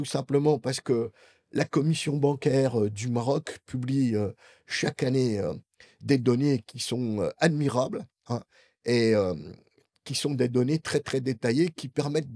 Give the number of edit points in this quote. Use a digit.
0